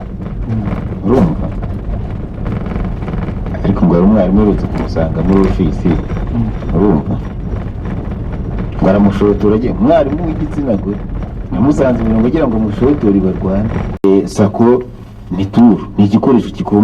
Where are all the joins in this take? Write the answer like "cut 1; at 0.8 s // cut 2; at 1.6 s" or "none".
cut 1; at 14.0 s